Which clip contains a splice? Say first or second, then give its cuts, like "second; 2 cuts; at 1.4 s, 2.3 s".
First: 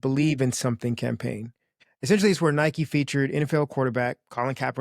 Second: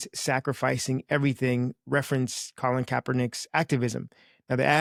first; 1 cut; at 1.8 s